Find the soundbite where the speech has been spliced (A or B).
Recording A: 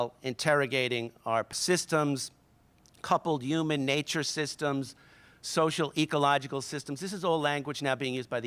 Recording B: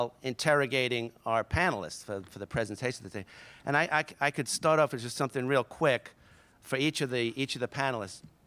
B